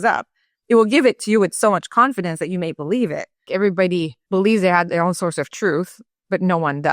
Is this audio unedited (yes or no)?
no